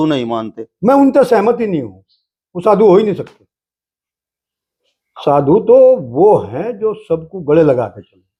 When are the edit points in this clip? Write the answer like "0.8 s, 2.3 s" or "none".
none